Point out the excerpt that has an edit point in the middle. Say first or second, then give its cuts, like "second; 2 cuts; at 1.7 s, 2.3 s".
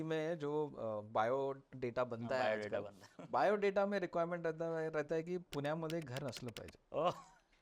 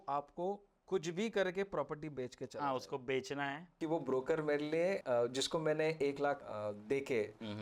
second; 3 cuts; at 3.6 s, 5.0 s, 6.5 s